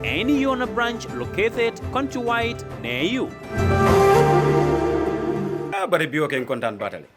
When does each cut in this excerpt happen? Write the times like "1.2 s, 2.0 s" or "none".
5.8 s